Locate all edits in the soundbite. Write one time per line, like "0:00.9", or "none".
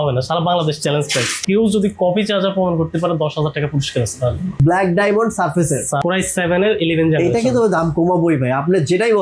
0:01.4
0:04.6
0:06.0